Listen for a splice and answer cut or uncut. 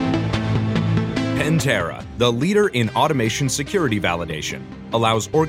cut